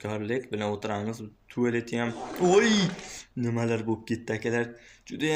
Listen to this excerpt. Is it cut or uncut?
uncut